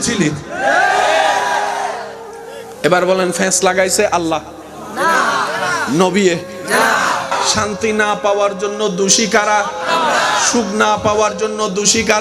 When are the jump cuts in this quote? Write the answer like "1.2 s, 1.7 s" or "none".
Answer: 7.3 s